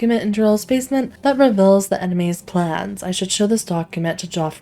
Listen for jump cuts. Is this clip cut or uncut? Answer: cut